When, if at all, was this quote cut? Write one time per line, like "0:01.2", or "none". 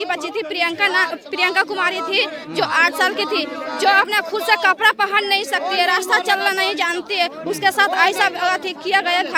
none